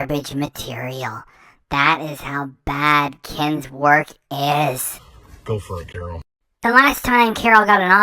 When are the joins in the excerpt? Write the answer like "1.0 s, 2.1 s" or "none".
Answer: 4.9 s, 6.3 s